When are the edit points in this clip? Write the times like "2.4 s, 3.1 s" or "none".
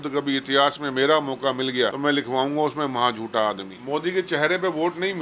2.0 s, 3.7 s